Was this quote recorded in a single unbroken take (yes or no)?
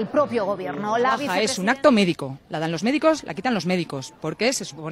no